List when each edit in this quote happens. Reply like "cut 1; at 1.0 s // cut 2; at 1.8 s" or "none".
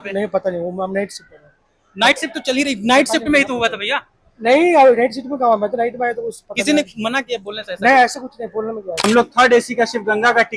cut 1; at 8.9 s